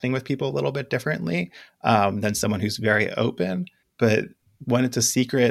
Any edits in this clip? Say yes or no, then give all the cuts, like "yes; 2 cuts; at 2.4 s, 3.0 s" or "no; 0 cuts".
yes; 2 cuts; at 3.8 s, 4.4 s